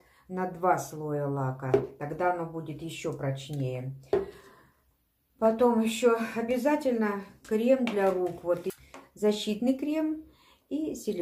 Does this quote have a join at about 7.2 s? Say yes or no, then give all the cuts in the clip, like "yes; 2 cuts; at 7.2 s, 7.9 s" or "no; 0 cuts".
no; 1 cut; at 8.6 s